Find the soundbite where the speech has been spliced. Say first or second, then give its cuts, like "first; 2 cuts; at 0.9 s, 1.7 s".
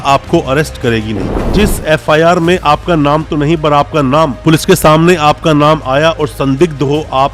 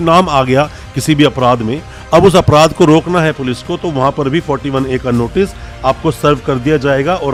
first; 1 cut; at 1.5 s